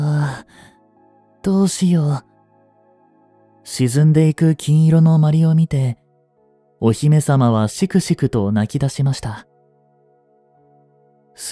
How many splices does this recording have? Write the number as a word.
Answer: two